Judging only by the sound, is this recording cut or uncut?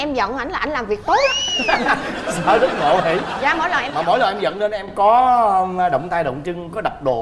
uncut